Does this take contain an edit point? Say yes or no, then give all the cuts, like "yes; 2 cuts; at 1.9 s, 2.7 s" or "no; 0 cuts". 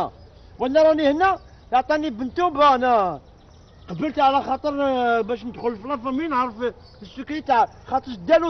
no; 0 cuts